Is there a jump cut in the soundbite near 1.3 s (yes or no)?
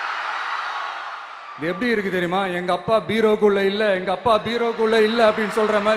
yes